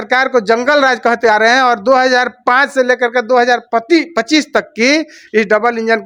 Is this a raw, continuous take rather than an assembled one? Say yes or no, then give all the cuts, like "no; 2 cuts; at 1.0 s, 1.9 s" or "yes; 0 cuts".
yes; 0 cuts